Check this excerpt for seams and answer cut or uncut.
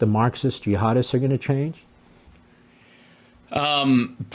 uncut